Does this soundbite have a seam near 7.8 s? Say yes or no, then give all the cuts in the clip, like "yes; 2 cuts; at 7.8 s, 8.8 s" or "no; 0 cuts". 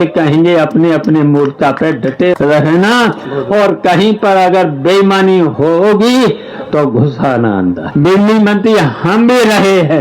yes; 3 cuts; at 2.3 s, 5.5 s, 7.8 s